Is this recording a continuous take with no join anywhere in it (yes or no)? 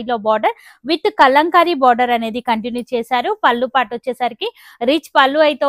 yes